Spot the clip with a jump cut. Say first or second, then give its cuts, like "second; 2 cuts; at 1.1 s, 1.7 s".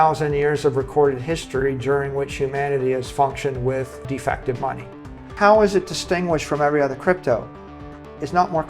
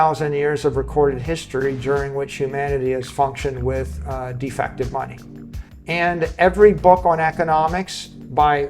first; 2 cuts; at 4.0 s, 5.2 s